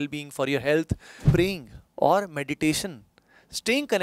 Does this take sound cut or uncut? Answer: cut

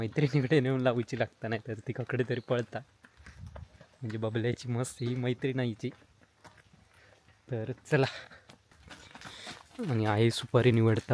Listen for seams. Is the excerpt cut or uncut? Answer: uncut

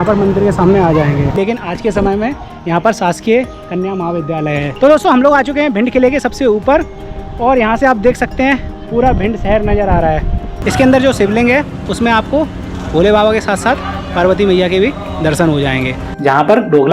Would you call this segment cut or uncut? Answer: cut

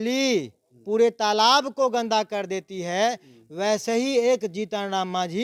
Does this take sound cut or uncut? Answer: uncut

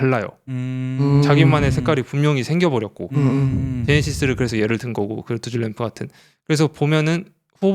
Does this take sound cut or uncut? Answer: uncut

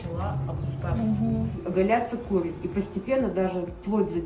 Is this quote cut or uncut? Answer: cut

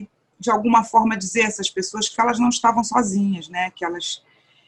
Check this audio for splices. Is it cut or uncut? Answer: uncut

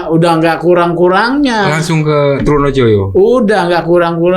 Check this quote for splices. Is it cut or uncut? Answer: uncut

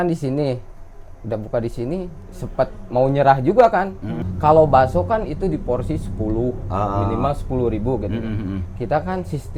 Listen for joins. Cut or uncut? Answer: cut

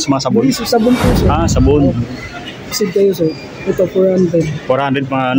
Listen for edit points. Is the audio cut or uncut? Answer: cut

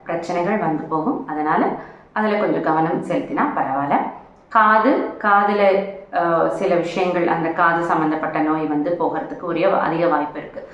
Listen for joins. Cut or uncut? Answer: uncut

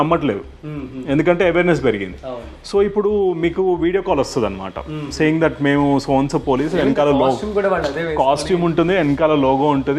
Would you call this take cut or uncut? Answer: uncut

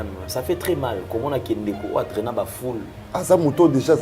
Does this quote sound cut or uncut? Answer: cut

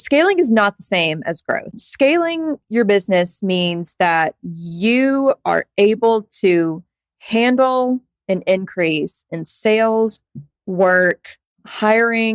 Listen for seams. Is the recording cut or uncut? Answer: uncut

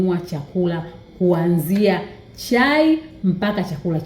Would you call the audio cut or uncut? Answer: uncut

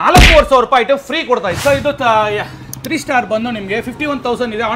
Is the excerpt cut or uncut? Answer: cut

